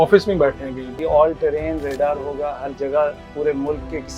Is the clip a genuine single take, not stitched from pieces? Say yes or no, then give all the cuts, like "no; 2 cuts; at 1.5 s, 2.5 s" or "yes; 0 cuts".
no; 1 cut; at 1.0 s